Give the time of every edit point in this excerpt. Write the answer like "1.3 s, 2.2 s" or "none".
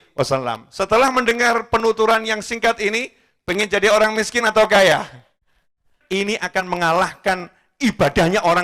5.9 s